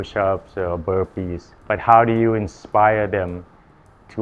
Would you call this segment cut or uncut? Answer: cut